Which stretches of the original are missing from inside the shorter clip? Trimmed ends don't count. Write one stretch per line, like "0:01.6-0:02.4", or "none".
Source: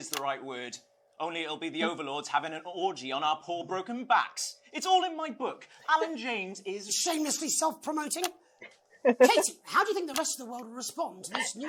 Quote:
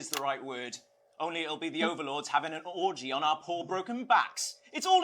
none